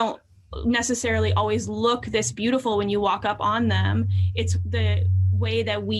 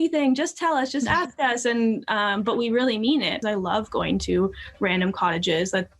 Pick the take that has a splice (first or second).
second